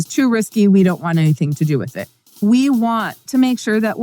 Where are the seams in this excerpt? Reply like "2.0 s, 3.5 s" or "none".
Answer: 2.4 s, 3.2 s